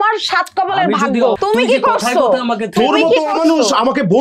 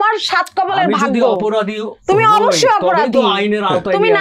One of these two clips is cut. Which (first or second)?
first